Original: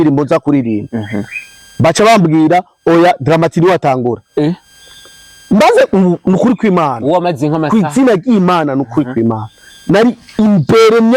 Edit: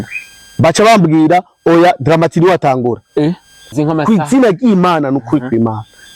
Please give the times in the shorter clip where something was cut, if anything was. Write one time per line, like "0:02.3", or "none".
0:03.7